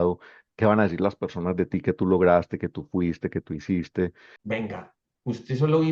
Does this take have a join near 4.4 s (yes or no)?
yes